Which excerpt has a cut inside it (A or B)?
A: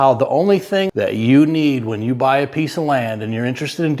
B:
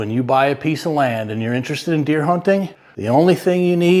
A